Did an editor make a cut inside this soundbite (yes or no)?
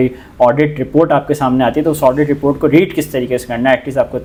no